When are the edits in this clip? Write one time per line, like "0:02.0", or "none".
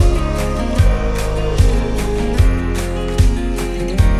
none